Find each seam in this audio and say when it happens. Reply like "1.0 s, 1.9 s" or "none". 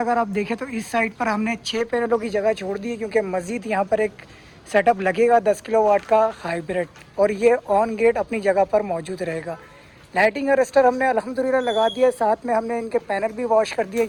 none